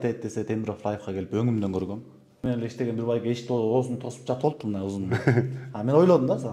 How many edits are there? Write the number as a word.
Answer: one